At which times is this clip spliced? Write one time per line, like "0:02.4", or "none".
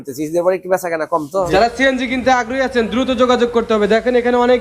0:01.5